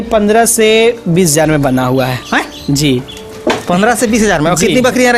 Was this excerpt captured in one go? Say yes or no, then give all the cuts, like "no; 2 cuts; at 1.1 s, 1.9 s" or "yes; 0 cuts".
yes; 0 cuts